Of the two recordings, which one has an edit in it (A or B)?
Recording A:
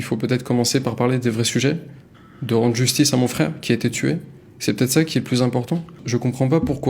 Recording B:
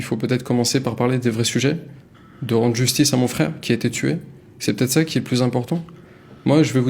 A